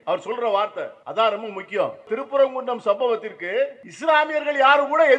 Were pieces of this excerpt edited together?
yes; 3 cuts; at 1.0 s, 2.1 s, 3.9 s

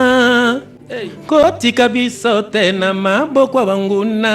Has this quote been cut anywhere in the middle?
no; 0 cuts

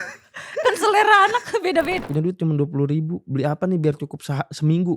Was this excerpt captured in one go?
no; 1 cut; at 2.0 s

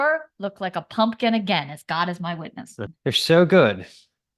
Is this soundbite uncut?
no; 1 cut; at 2.8 s

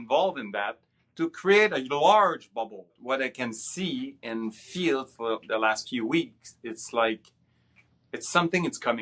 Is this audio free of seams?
no; 1 cut; at 3.0 s

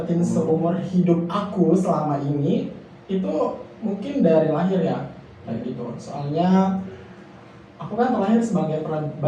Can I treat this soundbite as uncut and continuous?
yes; 0 cuts

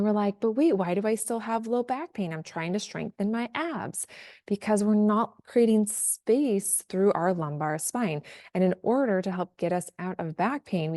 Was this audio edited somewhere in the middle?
no; 0 cuts

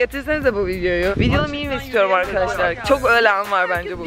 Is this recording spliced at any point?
yes; 1 cut; at 1.1 s

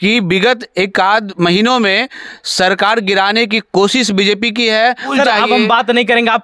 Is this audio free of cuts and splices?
no; 1 cut; at 5.1 s

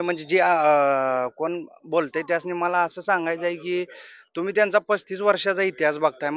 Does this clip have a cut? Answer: no; 0 cuts

